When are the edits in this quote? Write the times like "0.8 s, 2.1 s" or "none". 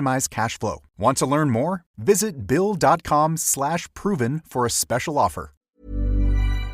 5.5 s